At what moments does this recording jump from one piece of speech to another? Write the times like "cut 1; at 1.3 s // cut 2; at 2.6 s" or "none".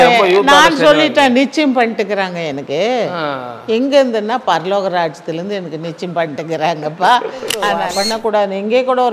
cut 1; at 7.5 s